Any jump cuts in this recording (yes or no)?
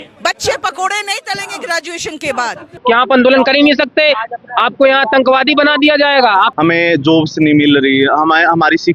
yes